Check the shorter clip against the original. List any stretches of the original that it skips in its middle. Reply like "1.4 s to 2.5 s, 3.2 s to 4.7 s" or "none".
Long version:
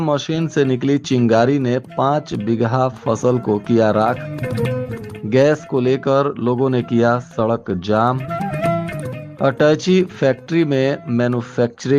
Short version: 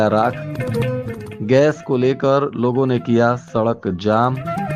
none